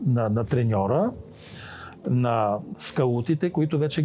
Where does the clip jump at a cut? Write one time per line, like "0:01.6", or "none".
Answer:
0:02.7